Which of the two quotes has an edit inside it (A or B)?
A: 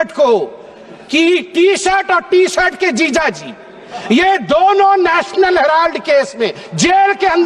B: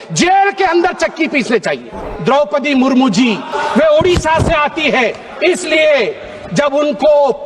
B